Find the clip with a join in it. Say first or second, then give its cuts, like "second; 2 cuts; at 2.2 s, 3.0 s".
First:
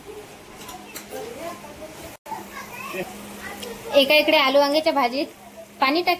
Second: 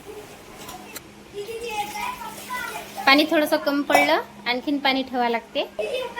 second; 1 cut; at 1.0 s